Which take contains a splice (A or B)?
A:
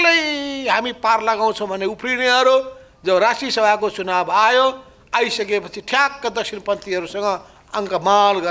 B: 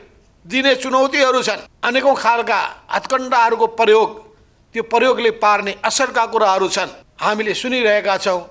B